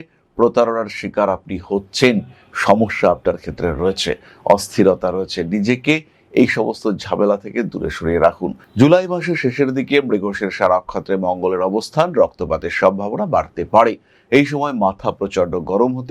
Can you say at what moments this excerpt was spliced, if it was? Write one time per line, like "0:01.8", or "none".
0:08.6